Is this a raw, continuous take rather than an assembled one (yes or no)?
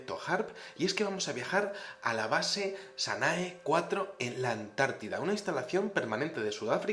no